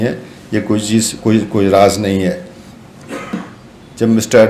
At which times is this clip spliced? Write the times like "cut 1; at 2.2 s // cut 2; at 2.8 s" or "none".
cut 1; at 3.3 s